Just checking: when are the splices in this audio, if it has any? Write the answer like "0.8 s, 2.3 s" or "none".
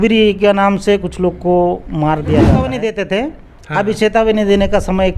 2.8 s